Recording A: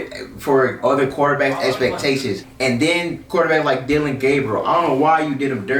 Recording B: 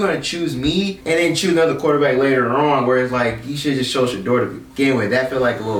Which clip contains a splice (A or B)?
A